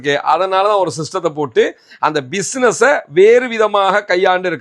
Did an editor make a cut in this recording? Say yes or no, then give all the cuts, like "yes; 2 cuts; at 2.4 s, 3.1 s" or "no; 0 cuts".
no; 0 cuts